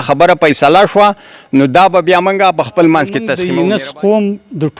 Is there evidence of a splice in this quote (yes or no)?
yes